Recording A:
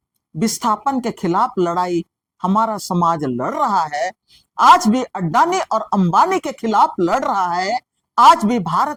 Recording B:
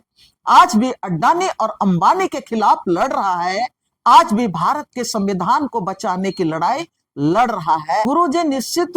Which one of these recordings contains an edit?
B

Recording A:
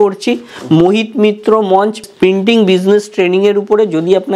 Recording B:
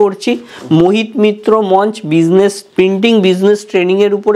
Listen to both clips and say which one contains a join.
A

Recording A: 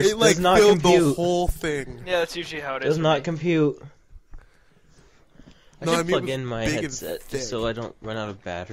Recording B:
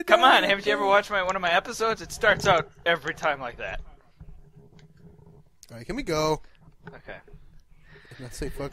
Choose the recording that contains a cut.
B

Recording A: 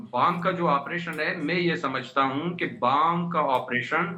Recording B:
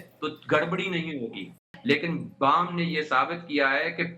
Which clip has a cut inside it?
B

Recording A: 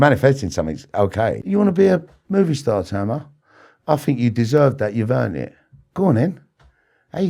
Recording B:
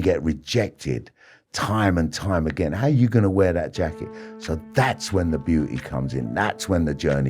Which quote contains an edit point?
A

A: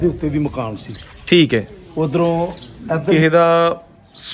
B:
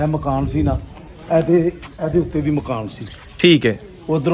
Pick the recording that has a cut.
A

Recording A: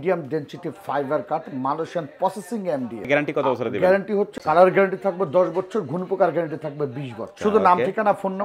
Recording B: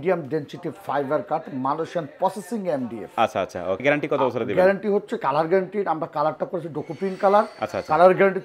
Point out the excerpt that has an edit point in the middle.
A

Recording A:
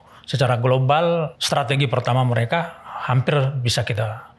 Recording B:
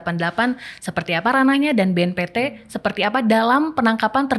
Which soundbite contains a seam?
A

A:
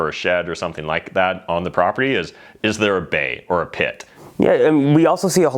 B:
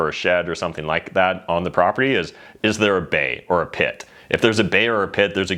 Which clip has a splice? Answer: A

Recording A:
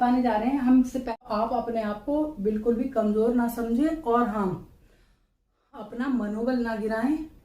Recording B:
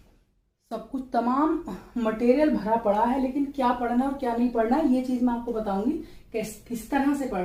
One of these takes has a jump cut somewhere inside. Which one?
A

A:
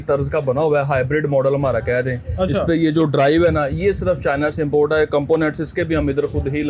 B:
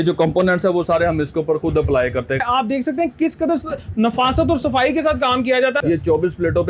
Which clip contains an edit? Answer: B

